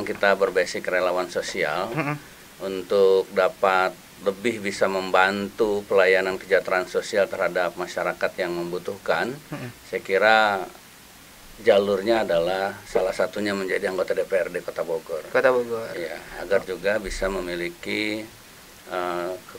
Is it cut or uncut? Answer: uncut